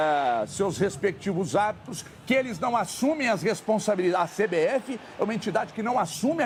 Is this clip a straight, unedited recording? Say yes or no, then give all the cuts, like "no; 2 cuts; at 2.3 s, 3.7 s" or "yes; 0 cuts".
yes; 0 cuts